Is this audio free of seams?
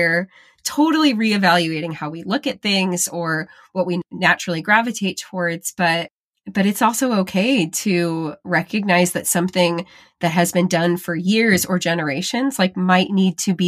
yes; 0 cuts

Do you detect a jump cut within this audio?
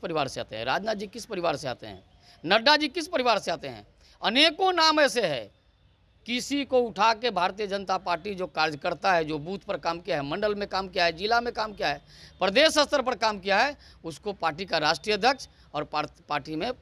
no; 0 cuts

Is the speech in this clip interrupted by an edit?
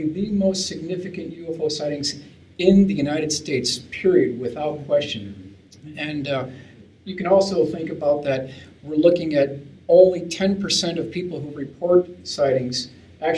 yes; 1 cut; at 12.2 s

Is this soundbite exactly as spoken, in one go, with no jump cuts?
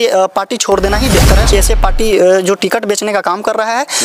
no; 1 cut; at 1.5 s

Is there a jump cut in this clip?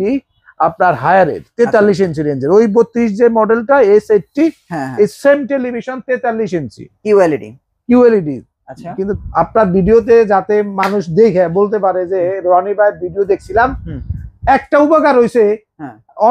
yes; 1 cut; at 9.1 s

